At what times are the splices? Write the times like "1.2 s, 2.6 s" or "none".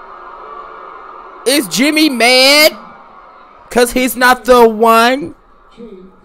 none